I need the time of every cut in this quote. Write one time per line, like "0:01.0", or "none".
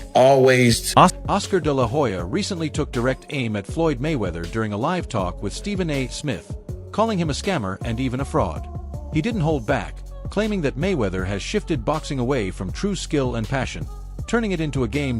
0:01.2